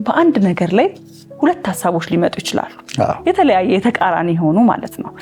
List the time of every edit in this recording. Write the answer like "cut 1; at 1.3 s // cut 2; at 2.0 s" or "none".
cut 1; at 3.2 s